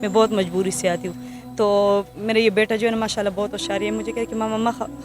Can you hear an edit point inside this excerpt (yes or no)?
no